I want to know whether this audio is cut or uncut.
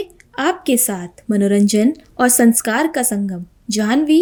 uncut